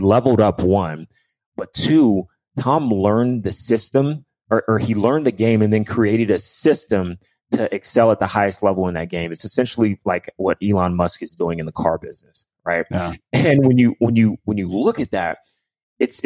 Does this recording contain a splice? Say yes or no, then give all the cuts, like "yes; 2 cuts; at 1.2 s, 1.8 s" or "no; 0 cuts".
no; 0 cuts